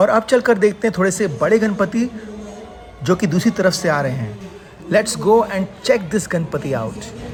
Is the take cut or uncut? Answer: uncut